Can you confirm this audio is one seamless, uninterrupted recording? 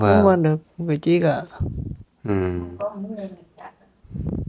yes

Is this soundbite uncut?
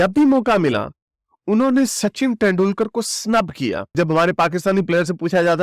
no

